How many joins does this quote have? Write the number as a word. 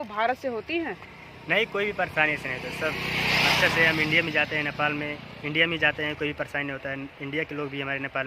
zero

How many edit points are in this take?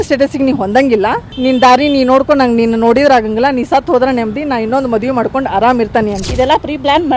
two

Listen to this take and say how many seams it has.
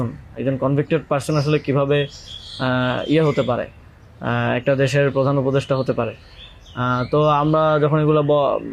zero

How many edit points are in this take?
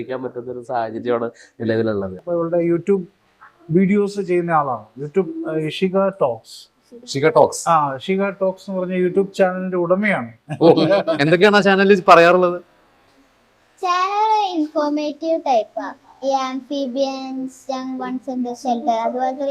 one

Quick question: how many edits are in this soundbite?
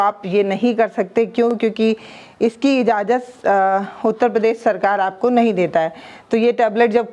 zero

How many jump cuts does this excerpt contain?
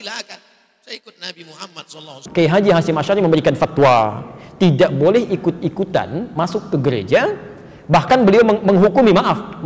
one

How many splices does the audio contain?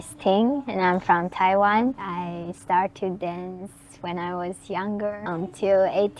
two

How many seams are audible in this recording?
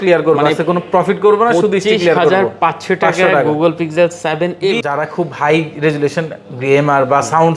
one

